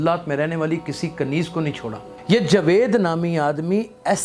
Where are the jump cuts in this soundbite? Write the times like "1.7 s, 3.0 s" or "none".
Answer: 2.1 s